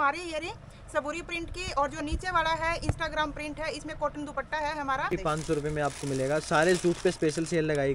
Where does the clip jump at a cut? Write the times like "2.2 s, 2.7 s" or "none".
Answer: 5.1 s